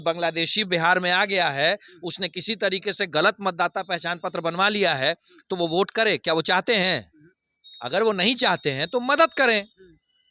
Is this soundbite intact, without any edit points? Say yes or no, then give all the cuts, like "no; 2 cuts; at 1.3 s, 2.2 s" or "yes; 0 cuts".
yes; 0 cuts